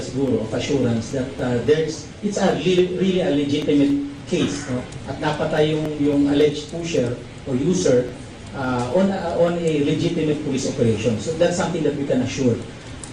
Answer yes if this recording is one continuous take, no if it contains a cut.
no